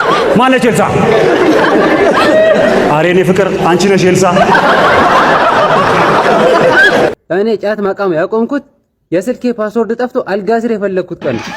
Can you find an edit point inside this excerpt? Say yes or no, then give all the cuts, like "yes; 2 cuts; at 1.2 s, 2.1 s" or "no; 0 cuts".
yes; 1 cut; at 7.2 s